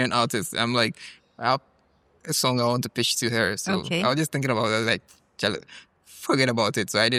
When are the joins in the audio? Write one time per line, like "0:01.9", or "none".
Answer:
none